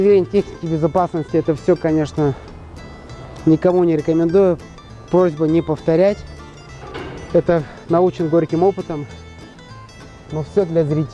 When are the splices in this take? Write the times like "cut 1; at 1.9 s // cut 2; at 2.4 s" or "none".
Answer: none